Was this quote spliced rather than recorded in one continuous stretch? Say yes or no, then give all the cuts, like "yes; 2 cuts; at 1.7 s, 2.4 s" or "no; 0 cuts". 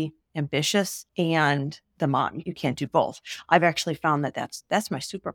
yes; 2 cuts; at 1.0 s, 2.5 s